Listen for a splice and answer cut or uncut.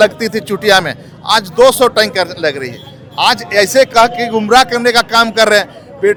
uncut